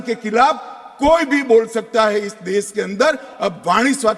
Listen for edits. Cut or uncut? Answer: uncut